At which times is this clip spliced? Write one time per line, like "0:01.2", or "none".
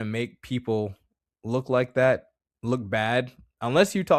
none